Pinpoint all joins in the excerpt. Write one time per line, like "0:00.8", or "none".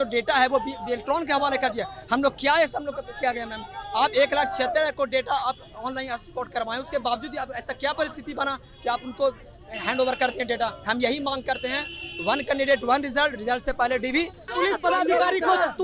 0:14.5